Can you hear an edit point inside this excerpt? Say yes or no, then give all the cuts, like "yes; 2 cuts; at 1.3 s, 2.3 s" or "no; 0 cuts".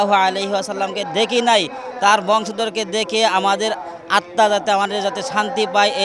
no; 0 cuts